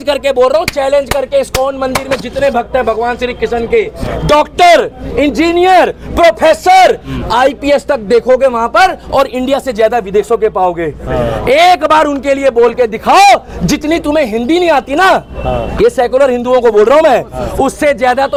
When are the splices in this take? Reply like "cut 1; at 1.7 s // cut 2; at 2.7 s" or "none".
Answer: none